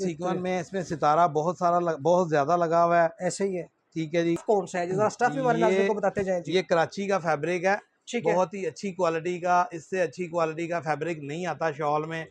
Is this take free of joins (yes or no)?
no